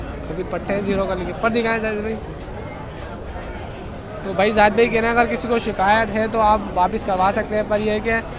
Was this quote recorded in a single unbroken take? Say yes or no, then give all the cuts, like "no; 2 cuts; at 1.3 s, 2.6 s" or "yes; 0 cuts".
yes; 0 cuts